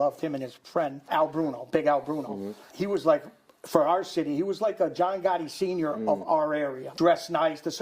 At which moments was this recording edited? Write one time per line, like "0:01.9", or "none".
0:01.0
0:02.7
0:06.8